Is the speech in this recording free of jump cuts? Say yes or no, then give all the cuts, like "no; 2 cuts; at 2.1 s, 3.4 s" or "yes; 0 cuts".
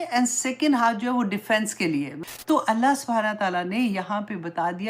no; 1 cut; at 2.2 s